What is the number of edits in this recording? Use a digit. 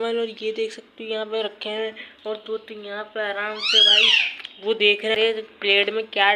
1